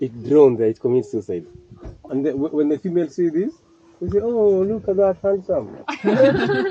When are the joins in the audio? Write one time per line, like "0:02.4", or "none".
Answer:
0:02.1